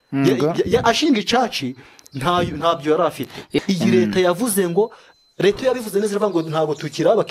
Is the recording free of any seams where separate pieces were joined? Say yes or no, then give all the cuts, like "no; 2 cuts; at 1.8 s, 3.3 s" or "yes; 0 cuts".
no; 1 cut; at 3.6 s